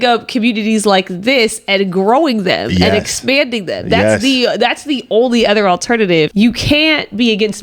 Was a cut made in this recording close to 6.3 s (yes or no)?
yes